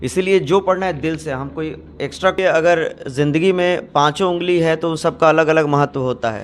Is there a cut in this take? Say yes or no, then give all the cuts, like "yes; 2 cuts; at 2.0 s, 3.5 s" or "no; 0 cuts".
yes; 1 cut; at 2.4 s